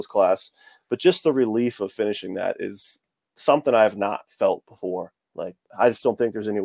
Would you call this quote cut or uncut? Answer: cut